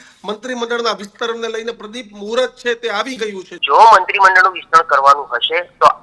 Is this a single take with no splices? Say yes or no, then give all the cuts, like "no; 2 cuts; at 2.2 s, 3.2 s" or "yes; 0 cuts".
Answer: no; 1 cut; at 3.5 s